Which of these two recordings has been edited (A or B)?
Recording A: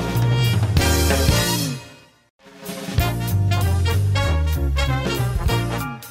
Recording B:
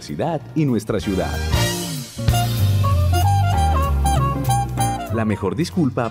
A